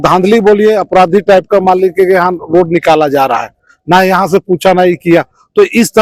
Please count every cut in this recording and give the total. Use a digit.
0